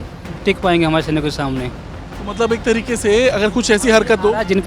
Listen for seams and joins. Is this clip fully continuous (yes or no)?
yes